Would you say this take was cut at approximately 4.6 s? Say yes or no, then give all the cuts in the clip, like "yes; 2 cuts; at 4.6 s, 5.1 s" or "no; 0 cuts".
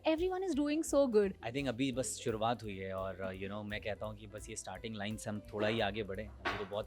no; 1 cut; at 1.4 s